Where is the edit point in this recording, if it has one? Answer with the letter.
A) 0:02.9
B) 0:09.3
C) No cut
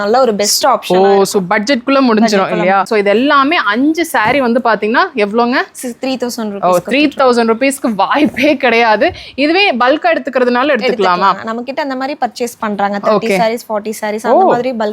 A